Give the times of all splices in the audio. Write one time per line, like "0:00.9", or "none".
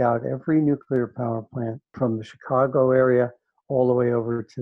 0:01.8